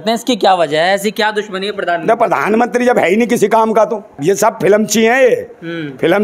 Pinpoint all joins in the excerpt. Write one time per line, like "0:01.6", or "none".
0:04.2